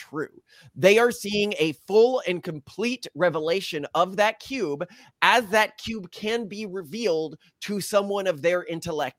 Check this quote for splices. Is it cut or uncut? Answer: uncut